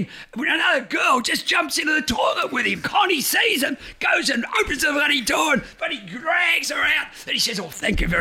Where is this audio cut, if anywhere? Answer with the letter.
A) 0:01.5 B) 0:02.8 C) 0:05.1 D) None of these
B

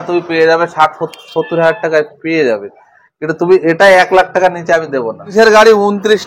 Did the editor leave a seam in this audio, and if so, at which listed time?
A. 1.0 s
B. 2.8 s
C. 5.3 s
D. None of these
C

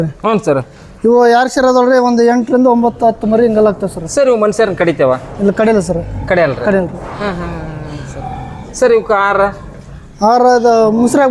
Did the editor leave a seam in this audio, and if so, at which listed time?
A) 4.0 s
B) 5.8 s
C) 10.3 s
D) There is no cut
D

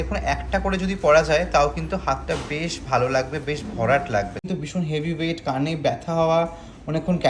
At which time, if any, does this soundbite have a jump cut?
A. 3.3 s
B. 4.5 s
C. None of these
B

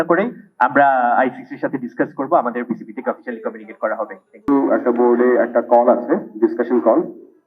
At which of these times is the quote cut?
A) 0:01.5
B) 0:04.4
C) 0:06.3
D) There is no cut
B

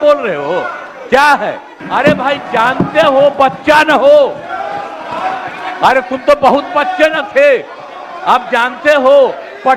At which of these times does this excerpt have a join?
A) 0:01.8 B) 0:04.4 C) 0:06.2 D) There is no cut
A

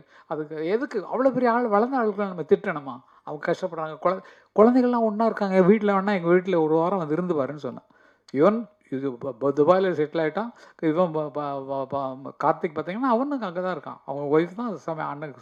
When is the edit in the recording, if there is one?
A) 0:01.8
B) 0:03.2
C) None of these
C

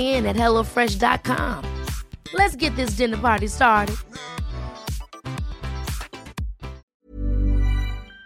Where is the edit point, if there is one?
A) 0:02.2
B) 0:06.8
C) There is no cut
B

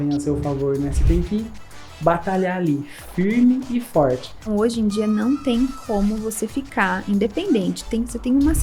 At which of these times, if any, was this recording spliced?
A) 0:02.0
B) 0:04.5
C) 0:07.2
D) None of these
B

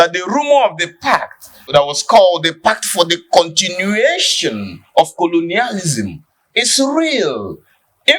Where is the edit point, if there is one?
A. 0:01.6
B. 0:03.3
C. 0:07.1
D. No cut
A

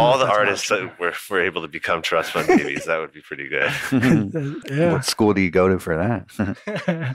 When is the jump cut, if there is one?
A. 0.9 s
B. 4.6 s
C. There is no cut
B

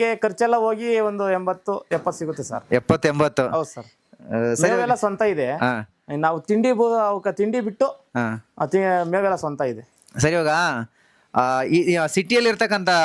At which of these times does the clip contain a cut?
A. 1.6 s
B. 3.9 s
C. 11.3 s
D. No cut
D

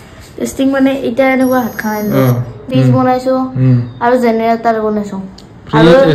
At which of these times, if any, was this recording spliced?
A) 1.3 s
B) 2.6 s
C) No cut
B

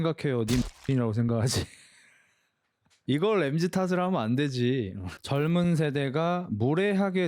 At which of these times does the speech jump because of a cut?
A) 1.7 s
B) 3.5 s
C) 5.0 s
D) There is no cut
C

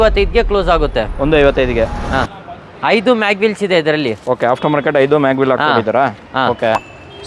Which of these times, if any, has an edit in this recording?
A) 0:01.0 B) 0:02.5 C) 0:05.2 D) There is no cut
D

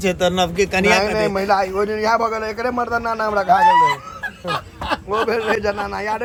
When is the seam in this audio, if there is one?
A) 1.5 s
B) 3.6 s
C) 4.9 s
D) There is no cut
D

